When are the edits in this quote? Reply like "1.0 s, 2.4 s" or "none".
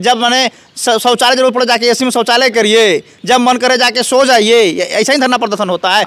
none